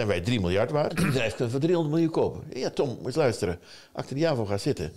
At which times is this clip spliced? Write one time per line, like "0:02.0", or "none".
0:00.9